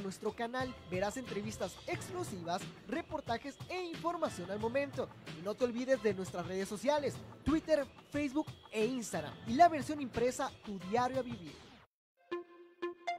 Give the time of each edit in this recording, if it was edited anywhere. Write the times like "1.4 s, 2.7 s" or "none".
12.1 s